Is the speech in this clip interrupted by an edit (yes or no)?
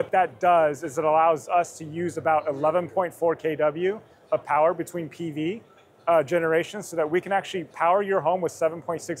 no